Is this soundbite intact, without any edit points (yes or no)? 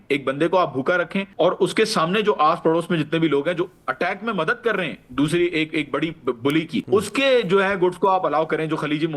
no